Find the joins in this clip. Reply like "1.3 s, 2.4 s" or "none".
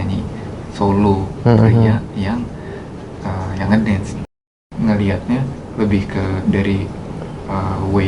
4.4 s